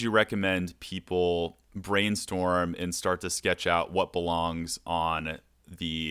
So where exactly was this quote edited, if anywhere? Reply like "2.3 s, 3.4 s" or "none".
1.7 s